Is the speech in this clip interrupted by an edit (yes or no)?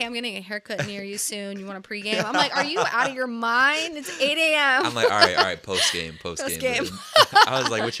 no